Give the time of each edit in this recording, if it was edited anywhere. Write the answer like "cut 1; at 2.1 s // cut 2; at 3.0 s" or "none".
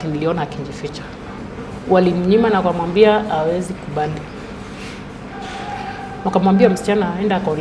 cut 1; at 1.4 s